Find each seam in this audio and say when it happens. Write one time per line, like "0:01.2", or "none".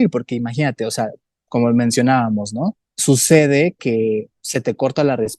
0:04.4